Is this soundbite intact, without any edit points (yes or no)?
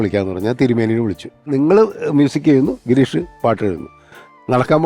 no